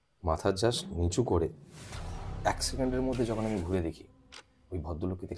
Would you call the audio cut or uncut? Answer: uncut